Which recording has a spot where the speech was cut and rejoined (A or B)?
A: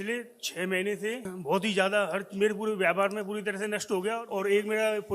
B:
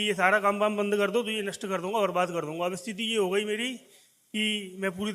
A